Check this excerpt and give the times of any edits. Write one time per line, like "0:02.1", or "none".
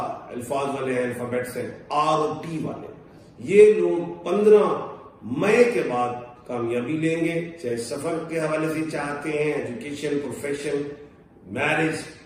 none